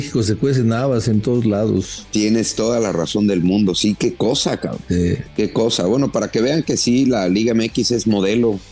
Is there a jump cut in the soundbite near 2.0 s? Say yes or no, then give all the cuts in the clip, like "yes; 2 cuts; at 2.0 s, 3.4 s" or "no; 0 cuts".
no; 0 cuts